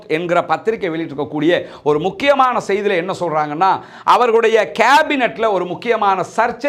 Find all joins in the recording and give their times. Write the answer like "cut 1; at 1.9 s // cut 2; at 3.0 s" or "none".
none